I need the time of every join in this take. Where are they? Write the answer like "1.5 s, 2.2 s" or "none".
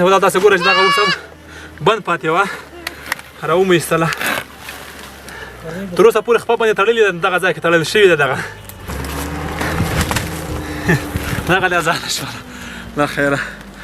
8.8 s